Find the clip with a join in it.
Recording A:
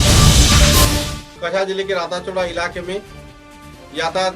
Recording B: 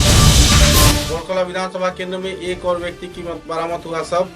B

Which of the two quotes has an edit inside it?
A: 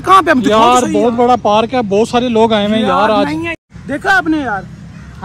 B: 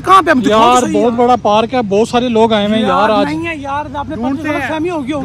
A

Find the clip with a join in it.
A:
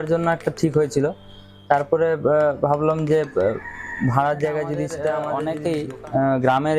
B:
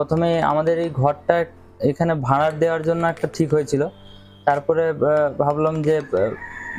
A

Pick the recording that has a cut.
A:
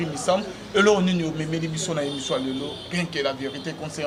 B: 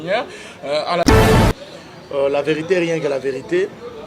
B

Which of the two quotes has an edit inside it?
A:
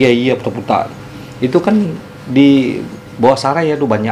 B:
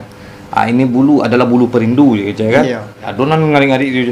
B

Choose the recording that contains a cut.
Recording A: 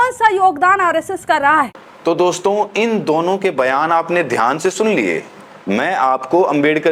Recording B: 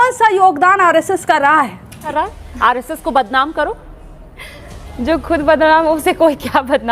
B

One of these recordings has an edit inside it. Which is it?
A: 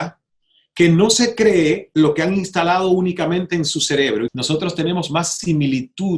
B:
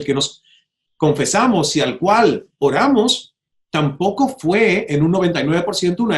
A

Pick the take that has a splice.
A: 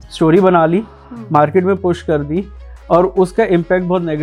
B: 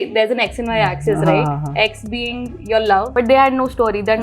B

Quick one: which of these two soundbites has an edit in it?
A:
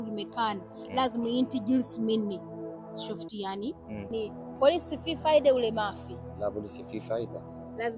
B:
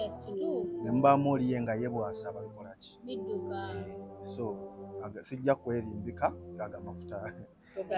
A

